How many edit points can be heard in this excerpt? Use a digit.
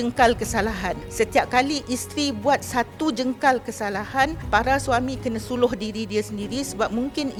0